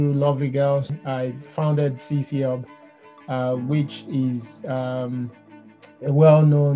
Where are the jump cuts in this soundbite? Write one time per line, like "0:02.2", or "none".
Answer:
0:01.0